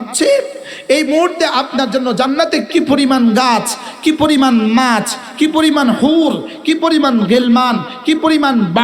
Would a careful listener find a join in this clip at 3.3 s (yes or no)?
no